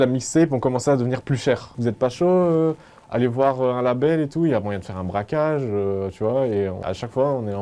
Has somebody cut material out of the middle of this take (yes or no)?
yes